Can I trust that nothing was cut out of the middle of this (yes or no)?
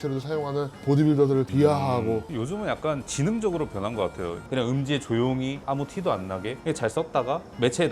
no